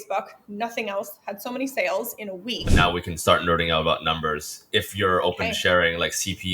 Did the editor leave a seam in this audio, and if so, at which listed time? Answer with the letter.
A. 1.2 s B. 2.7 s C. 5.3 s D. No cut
B